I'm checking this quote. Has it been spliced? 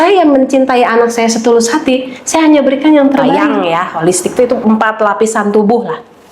yes; 1 cut; at 3.6 s

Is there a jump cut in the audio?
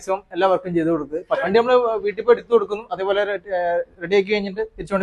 yes; 1 cut; at 1.4 s

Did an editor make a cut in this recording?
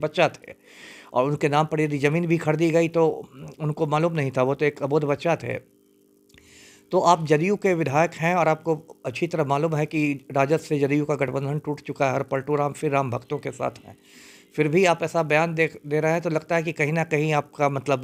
no; 0 cuts

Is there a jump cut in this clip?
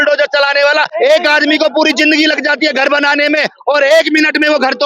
yes; 1 cut; at 0.9 s

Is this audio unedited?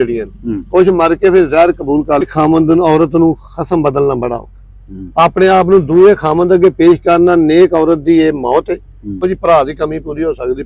no; 2 cuts; at 2.3 s, 9.2 s

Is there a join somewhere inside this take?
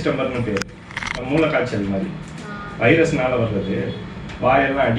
no; 0 cuts

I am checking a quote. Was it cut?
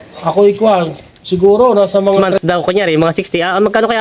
yes; 1 cut; at 2.3 s

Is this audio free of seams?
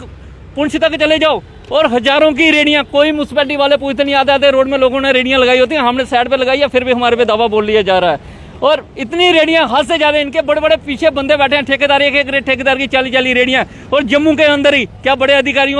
yes; 0 cuts

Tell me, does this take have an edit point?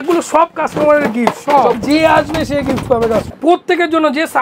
yes; 2 cuts; at 1.8 s, 3.3 s

